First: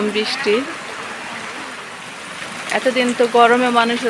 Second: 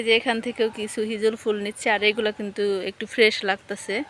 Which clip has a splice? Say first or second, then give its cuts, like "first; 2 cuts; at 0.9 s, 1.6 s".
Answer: first; 1 cut; at 2.0 s